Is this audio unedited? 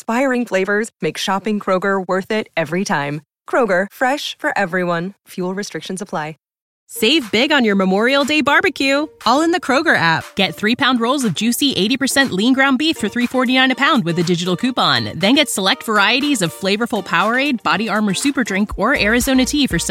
no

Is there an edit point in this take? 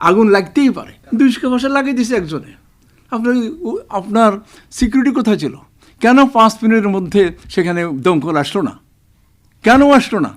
yes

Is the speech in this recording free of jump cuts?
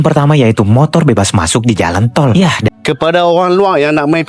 no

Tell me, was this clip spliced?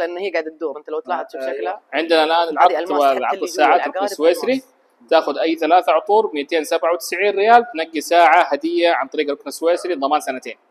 yes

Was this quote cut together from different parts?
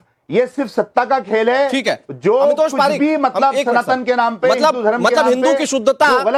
no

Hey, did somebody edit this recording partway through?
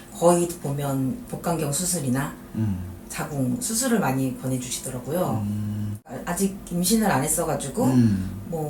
no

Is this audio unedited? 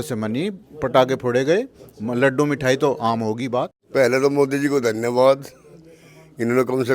no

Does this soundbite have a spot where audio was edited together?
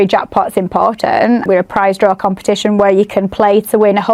yes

